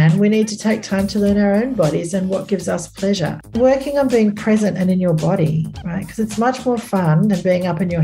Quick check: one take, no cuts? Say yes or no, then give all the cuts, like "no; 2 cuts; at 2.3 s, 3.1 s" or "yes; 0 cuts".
no; 1 cut; at 3.5 s